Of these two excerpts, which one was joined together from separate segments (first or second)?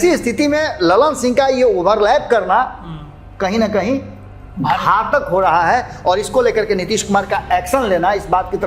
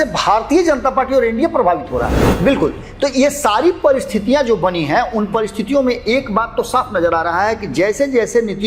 second